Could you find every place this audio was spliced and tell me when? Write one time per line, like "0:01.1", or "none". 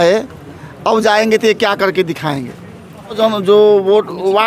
0:03.2